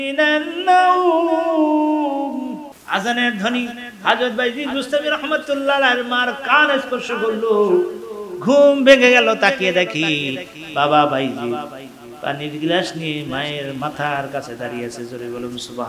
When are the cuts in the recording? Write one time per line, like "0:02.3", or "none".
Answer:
0:02.7